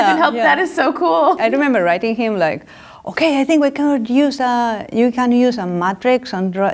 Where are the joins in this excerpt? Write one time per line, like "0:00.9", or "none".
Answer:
0:01.4